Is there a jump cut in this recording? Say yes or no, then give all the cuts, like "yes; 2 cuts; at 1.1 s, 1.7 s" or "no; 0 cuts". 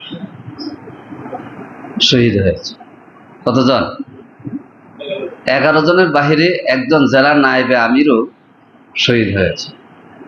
no; 0 cuts